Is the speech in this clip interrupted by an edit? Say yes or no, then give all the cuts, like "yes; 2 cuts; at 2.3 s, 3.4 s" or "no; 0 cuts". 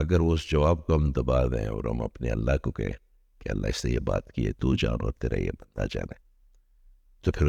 no; 0 cuts